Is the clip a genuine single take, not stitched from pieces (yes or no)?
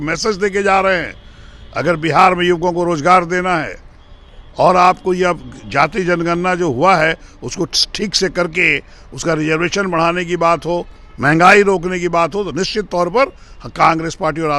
yes